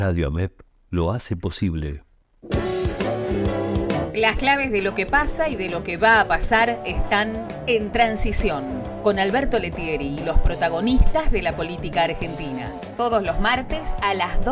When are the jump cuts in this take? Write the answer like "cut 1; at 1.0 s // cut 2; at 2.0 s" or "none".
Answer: cut 1; at 2.4 s